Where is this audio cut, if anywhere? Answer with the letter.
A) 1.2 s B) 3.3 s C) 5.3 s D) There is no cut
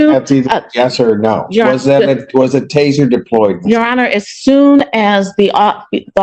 D